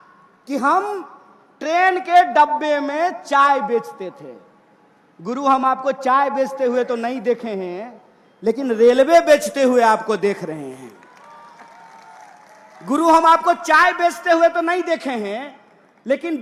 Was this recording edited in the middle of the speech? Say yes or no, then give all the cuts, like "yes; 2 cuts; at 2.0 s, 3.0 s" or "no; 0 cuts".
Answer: no; 0 cuts